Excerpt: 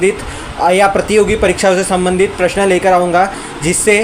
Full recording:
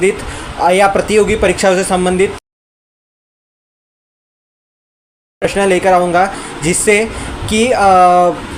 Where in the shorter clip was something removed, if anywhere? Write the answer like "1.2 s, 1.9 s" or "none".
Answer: 2.4 s